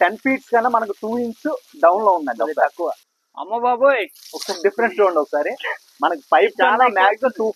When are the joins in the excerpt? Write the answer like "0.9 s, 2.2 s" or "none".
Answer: 3.0 s